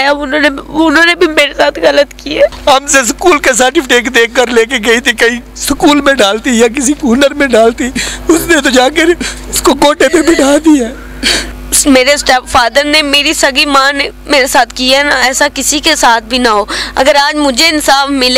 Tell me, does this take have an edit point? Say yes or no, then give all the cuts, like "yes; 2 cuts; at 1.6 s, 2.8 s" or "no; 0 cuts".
yes; 2 cuts; at 2.6 s, 11.7 s